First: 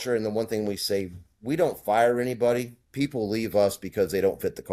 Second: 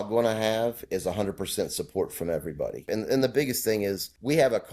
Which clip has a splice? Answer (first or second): second